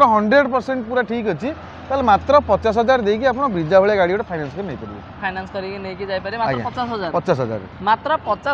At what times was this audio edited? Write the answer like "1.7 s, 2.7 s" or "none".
none